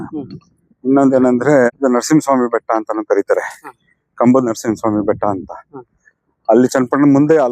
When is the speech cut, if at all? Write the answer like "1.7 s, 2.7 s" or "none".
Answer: 1.8 s